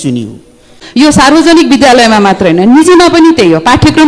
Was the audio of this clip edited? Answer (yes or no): yes